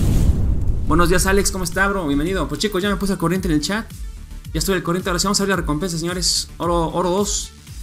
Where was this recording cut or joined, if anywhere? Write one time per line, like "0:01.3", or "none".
0:00.9